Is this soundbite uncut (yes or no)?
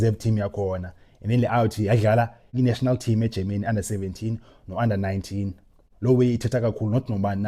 yes